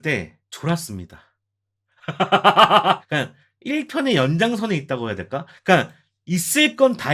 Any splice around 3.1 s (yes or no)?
yes